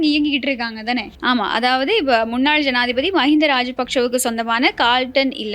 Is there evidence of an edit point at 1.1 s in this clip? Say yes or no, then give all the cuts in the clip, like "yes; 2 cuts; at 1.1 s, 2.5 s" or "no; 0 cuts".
yes; 1 cut; at 1.1 s